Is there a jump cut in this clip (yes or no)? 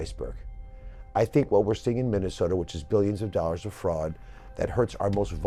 no